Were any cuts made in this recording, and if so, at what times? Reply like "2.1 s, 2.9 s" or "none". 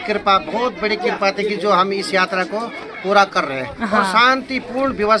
none